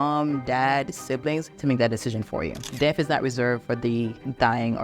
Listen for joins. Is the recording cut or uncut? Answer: cut